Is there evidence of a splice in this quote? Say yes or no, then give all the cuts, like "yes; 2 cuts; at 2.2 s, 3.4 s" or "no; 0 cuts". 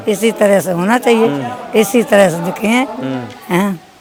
no; 0 cuts